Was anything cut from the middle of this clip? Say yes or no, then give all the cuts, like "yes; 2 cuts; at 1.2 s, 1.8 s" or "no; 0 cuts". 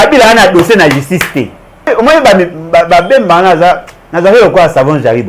yes; 1 cut; at 1.9 s